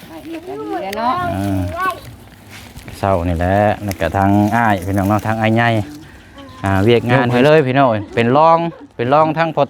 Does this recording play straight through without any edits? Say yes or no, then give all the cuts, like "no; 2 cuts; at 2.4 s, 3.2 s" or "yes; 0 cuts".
no; 1 cut; at 7.1 s